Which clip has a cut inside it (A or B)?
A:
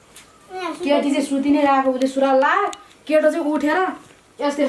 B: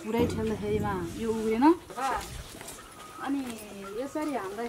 B